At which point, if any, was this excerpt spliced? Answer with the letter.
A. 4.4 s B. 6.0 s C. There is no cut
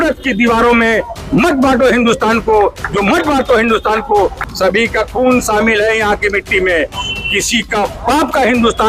A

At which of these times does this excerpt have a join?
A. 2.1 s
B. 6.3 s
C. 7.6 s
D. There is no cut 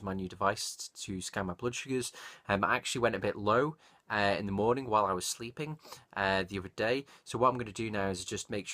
A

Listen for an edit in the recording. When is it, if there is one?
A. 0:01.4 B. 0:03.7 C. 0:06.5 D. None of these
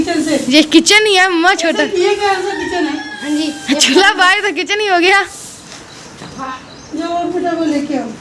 C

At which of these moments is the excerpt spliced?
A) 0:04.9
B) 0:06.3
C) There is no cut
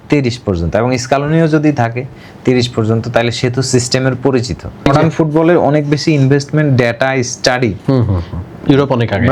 A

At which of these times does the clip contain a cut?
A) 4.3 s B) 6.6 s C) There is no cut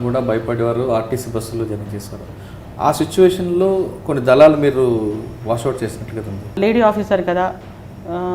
B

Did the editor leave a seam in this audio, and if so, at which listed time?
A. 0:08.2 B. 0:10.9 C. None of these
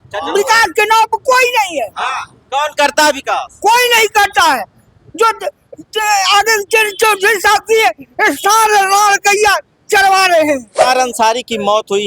B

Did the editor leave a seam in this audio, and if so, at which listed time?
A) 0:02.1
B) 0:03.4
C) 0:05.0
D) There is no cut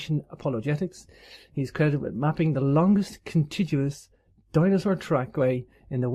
D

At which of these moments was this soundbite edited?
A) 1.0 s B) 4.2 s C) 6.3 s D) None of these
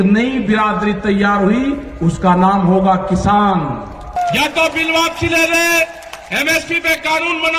B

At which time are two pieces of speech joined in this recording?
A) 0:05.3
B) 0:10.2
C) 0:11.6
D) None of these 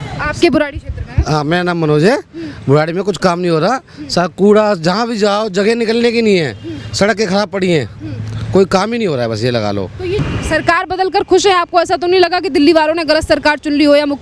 B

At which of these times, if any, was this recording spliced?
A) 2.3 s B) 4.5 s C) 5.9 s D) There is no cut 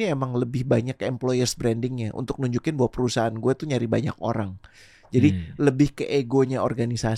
D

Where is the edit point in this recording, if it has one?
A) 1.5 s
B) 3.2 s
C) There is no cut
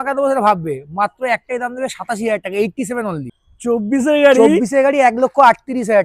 B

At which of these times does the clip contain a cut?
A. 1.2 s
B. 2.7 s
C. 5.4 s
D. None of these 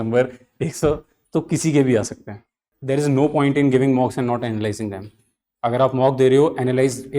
B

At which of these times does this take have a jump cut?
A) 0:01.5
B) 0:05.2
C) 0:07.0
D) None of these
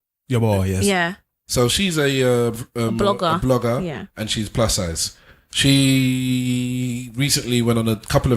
A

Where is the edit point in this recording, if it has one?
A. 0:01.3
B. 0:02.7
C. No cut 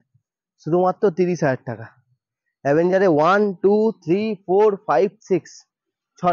C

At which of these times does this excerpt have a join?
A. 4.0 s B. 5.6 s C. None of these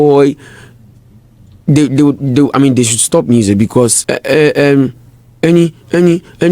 A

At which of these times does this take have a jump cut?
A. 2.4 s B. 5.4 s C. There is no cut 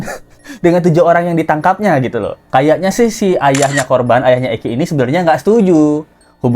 A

